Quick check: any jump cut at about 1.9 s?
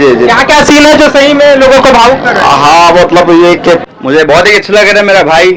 no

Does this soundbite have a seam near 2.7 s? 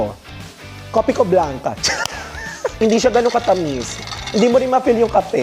yes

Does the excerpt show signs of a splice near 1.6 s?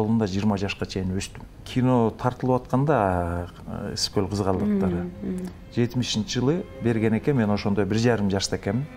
yes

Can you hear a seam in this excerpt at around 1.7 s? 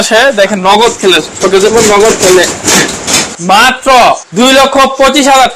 no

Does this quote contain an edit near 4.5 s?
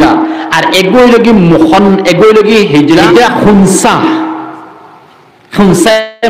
no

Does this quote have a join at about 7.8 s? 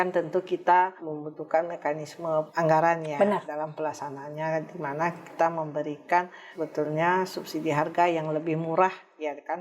no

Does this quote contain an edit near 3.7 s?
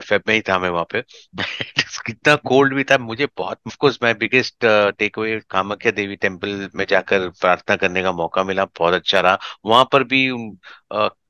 yes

